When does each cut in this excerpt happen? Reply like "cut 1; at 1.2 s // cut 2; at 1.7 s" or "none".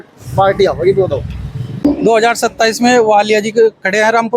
cut 1; at 1.8 s